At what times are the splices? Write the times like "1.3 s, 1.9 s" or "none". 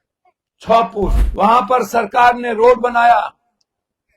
1.2 s